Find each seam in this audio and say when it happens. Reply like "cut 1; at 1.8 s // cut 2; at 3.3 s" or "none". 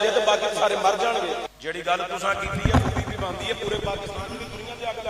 cut 1; at 1.5 s